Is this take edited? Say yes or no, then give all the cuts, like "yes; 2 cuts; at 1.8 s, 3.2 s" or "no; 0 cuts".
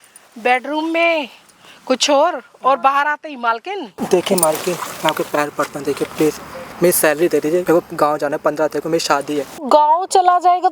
yes; 3 cuts; at 3.9 s, 7.6 s, 9.6 s